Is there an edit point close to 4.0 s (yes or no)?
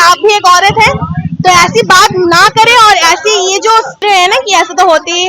yes